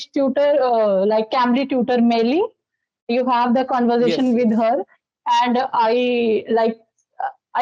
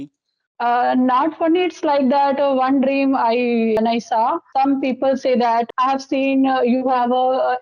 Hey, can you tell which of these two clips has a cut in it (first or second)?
second